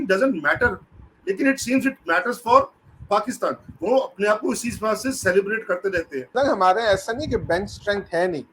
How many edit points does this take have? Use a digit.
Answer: 2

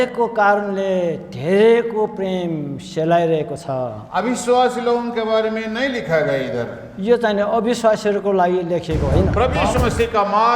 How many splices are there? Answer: 1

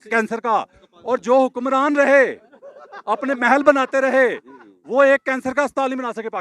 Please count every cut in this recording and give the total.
0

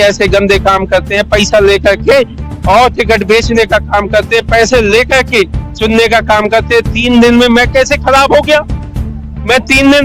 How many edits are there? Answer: 0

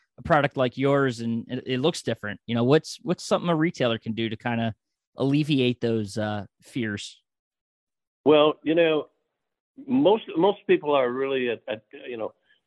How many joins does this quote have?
0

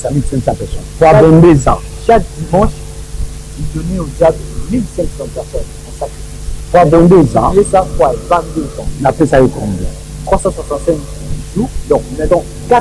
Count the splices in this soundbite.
0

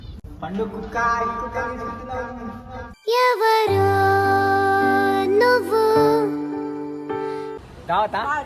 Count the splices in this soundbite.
1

